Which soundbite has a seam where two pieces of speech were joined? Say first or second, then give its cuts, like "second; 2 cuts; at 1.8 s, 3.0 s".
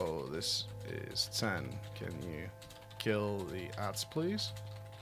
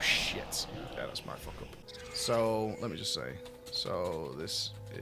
second; 1 cut; at 1.9 s